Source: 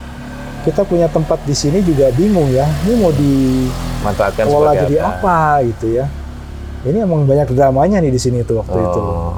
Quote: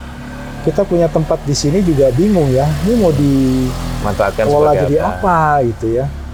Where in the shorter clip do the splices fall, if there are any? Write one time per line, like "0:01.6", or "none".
none